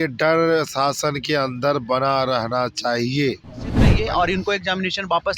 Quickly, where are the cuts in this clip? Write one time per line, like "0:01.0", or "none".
0:03.9